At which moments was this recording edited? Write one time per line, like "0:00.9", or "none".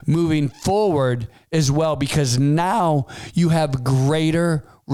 none

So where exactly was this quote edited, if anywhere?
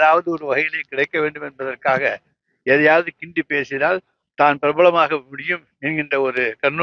none

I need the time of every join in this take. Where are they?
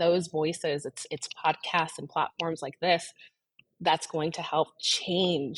none

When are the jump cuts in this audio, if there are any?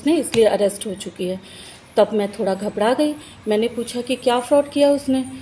none

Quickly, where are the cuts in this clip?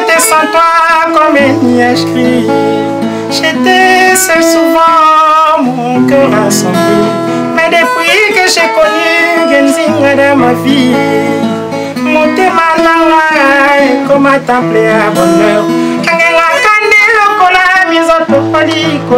none

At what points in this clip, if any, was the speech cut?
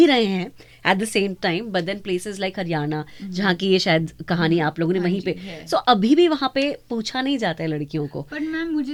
none

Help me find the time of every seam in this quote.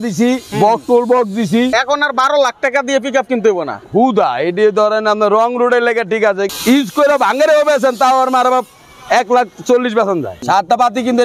0:01.7
0:06.5
0:10.4

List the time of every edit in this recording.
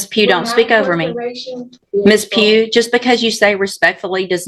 0:01.8

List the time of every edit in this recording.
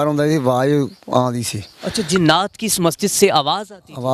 none

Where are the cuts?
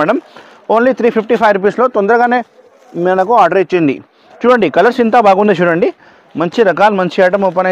none

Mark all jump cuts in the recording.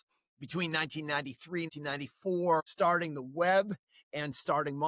0:01.7
0:02.7

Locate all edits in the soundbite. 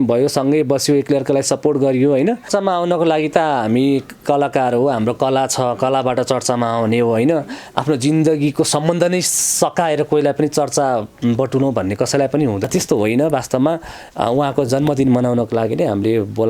0:02.5
0:12.7

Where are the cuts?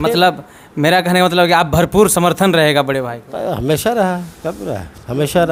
none

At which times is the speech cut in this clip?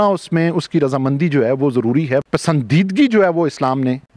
0:02.2

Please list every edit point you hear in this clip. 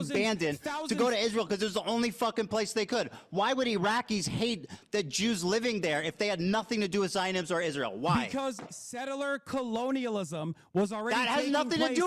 none

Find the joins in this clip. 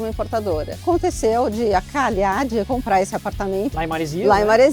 0:00.8
0:02.7
0:03.7

